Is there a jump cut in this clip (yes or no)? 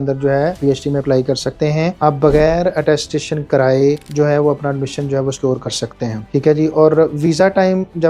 yes